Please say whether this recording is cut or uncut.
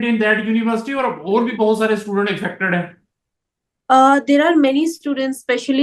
uncut